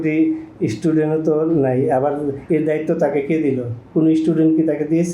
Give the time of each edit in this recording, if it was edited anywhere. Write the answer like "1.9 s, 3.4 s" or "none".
none